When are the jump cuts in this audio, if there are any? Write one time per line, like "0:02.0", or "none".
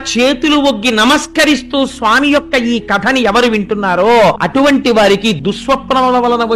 0:04.4
0:05.4